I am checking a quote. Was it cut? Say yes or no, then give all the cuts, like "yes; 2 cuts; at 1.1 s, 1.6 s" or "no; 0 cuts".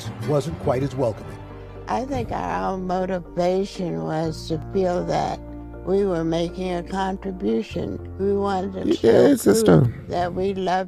no; 0 cuts